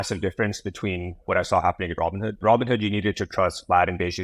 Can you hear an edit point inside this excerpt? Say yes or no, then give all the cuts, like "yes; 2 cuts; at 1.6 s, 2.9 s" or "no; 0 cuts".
yes; 2 cuts; at 1.2 s, 2.3 s